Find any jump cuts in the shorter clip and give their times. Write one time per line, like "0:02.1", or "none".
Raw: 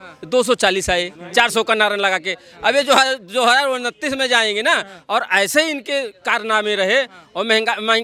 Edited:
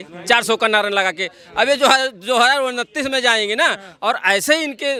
none